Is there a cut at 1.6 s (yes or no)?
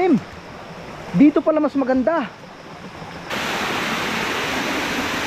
no